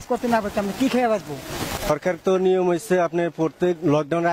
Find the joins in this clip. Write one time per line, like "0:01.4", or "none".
0:01.7